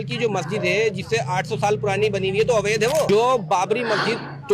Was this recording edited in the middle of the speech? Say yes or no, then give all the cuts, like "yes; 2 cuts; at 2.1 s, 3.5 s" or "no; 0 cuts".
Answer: yes; 1 cut; at 3.1 s